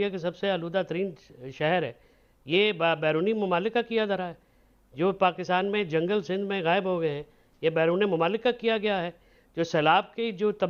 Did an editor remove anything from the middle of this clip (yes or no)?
no